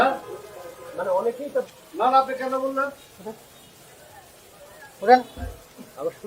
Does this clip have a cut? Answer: no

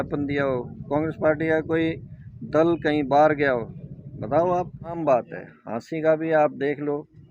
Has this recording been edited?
yes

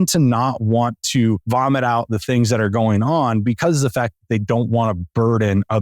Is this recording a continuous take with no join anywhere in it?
no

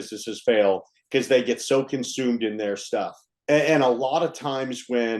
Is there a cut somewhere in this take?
no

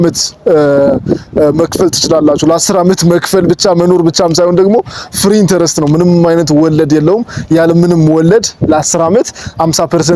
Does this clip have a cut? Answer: no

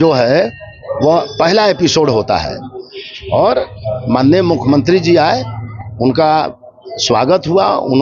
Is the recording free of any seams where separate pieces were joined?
yes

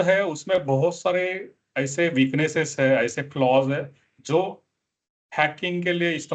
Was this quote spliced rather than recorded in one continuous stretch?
no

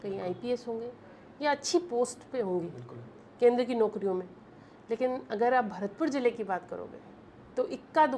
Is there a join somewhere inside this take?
no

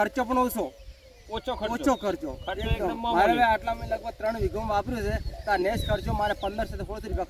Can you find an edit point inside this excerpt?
no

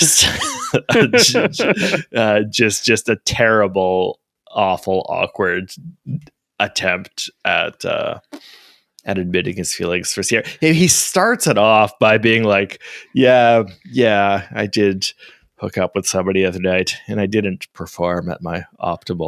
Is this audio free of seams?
yes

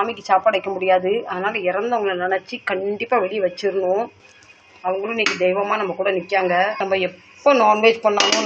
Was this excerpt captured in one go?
yes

